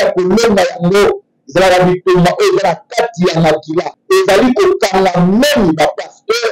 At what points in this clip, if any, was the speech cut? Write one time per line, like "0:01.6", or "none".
0:03.9